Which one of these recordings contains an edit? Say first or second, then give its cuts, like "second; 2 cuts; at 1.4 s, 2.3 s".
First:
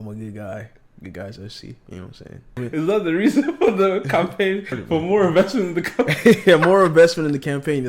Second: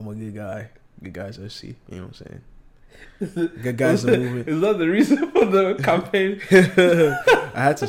first; 2 cuts; at 2.6 s, 4.6 s